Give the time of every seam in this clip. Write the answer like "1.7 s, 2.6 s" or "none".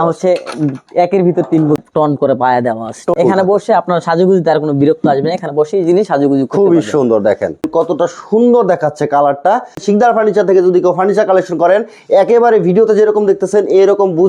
1.8 s, 3.2 s, 7.7 s, 9.8 s